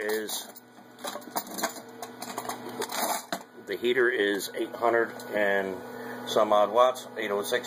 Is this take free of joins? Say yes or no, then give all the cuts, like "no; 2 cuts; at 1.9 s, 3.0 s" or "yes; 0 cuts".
no; 1 cut; at 5.2 s